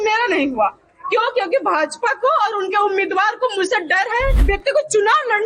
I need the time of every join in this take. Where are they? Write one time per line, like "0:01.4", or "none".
0:04.4